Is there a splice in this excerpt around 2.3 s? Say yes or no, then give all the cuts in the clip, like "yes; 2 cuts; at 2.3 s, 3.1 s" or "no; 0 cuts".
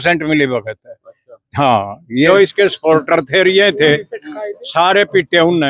yes; 1 cut; at 2.3 s